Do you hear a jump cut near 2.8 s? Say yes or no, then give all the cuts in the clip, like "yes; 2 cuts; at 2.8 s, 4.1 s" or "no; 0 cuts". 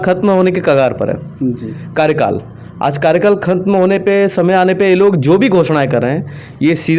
no; 0 cuts